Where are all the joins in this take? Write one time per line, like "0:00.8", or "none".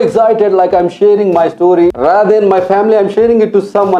0:02.0